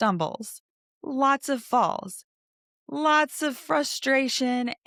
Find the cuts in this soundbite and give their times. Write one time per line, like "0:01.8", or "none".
none